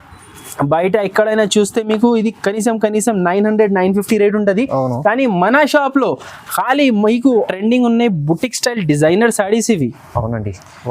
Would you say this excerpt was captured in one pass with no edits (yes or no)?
no